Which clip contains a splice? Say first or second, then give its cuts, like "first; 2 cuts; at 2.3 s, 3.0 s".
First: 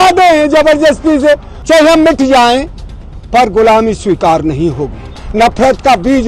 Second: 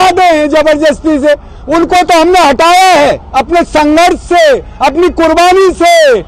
first; 2 cuts; at 1.5 s, 5.2 s